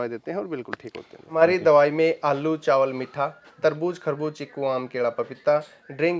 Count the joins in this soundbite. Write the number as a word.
one